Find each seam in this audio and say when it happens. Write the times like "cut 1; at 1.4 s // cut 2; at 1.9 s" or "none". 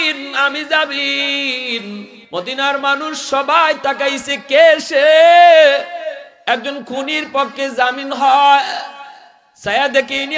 cut 1; at 2.1 s